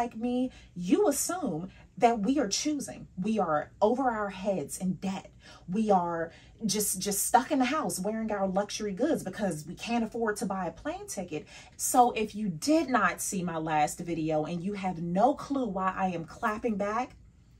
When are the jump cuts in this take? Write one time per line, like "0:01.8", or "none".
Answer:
0:11.6